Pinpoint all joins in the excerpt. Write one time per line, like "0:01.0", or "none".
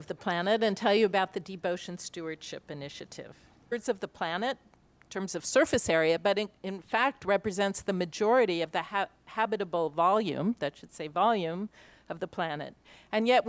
none

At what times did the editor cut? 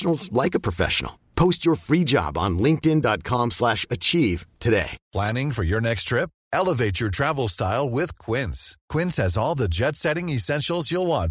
0:05.0

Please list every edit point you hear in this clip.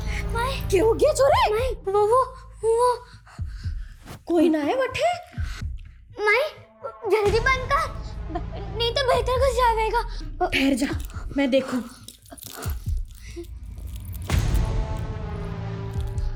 none

